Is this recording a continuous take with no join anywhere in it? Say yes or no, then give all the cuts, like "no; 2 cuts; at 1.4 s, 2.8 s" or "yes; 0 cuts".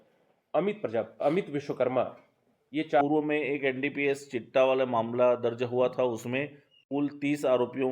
no; 1 cut; at 3.0 s